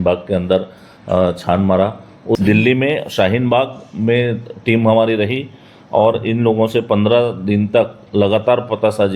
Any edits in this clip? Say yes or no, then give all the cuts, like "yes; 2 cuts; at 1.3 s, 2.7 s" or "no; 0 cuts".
yes; 1 cut; at 2.4 s